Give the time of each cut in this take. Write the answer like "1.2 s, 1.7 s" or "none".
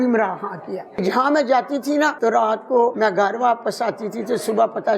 1.0 s, 2.2 s, 2.9 s